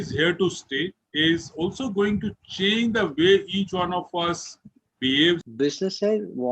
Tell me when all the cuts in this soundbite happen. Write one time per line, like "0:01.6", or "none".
0:05.4